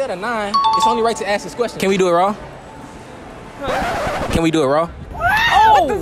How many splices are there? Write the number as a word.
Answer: one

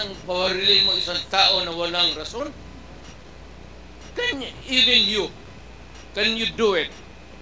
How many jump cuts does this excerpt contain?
zero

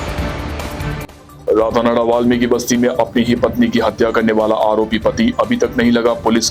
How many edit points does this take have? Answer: one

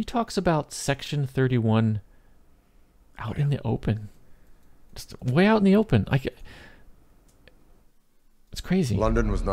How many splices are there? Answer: zero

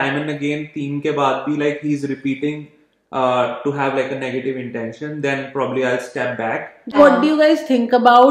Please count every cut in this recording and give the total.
one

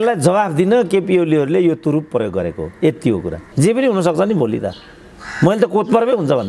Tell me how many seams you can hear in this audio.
one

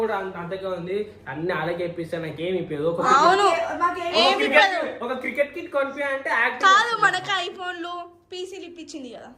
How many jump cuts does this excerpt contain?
zero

